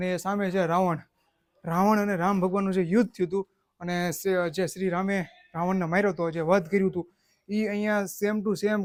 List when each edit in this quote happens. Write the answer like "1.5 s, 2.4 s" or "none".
none